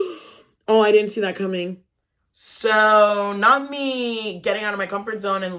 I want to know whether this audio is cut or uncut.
cut